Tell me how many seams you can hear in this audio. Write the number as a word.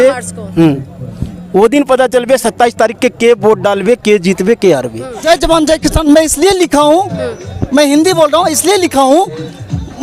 one